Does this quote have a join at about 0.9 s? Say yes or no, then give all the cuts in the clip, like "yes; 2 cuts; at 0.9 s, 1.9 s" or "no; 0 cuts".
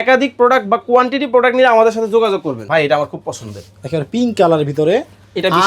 no; 1 cut; at 2.6 s